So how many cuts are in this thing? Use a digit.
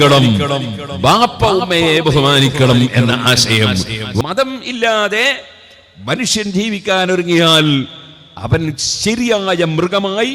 1